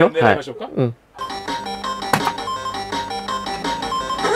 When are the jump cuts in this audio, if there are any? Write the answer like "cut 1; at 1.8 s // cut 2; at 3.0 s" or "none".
cut 1; at 1.1 s